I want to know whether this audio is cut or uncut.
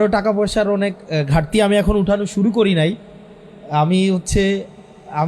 uncut